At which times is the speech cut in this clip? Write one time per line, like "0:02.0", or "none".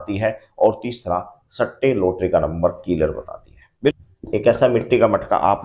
0:03.9